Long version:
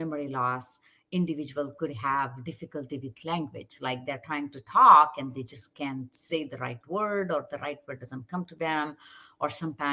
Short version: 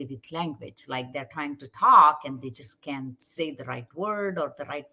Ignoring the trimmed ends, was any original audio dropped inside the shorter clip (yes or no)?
no